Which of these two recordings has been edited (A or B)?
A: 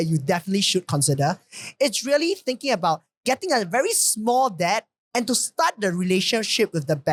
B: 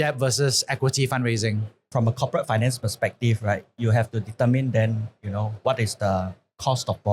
B